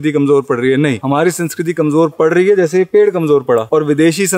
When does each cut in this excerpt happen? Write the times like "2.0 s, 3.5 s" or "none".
none